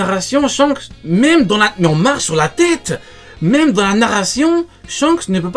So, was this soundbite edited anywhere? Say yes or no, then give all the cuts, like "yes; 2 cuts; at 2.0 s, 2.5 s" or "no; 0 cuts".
no; 0 cuts